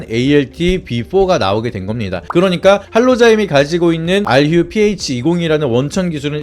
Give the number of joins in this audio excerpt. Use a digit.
1